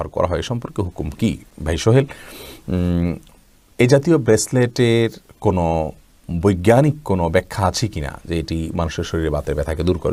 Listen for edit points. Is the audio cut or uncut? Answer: uncut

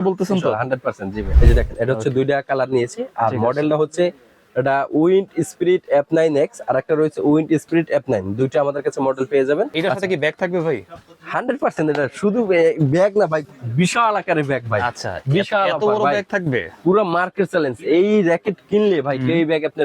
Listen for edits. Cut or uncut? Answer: cut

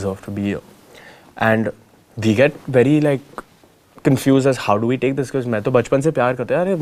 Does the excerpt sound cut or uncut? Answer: uncut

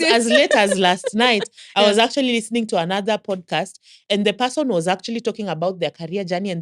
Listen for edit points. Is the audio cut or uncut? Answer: cut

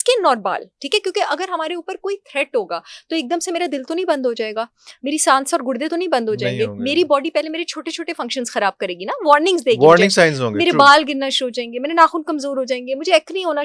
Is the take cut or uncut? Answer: uncut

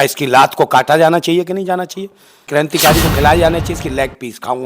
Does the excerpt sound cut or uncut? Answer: cut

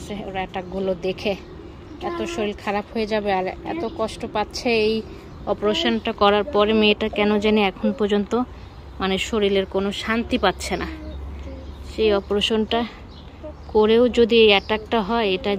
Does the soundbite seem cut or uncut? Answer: uncut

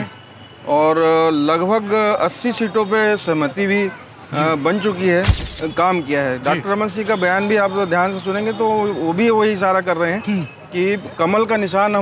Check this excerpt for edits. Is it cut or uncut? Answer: cut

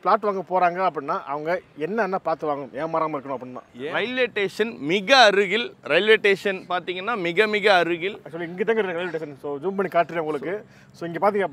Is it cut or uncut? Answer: cut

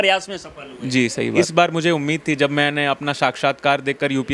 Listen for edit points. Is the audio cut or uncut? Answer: cut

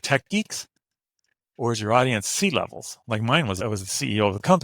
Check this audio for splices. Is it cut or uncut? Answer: cut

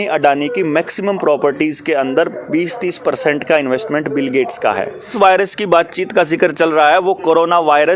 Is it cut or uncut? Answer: cut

